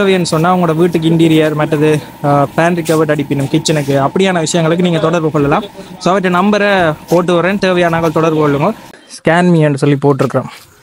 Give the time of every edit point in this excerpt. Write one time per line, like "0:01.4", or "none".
0:08.9